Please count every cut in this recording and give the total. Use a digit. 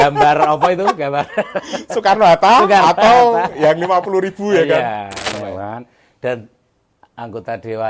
1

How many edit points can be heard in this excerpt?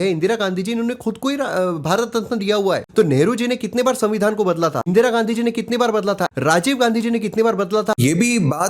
4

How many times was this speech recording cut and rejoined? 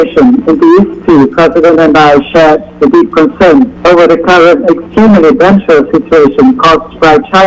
1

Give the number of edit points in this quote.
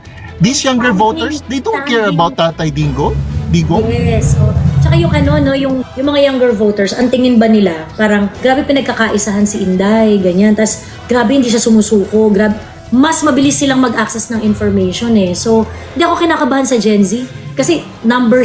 3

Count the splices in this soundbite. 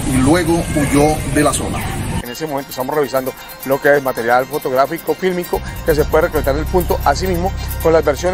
1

